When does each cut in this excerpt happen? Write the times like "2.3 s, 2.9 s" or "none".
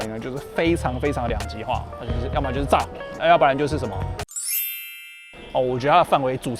none